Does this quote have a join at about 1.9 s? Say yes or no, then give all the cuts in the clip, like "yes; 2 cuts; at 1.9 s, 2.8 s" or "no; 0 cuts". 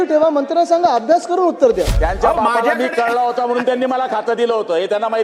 yes; 1 cut; at 1.9 s